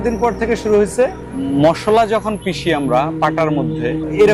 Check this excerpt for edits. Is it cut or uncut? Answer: uncut